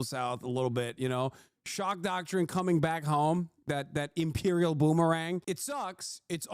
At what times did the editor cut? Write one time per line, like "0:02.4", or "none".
0:05.4